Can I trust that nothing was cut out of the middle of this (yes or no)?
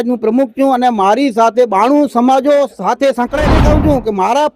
no